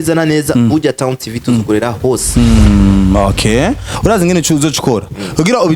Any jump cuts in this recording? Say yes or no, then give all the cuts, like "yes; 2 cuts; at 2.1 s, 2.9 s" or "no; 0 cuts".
yes; 1 cut; at 3.9 s